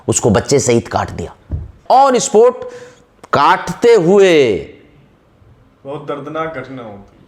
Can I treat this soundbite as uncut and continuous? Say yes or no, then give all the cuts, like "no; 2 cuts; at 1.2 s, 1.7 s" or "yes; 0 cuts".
no; 1 cut; at 1.7 s